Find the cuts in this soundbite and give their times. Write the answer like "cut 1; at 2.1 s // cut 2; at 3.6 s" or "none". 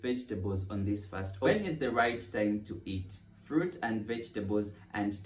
cut 1; at 1.5 s

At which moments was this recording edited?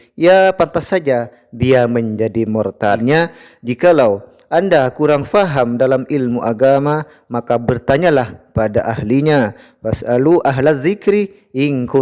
cut 1; at 3.0 s

